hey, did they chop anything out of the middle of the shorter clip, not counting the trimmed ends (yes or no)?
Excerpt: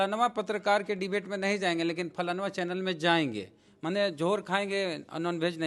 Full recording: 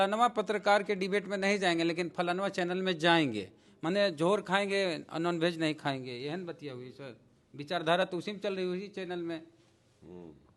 no